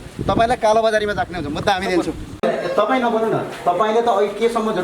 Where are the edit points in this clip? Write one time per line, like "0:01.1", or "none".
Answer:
0:02.4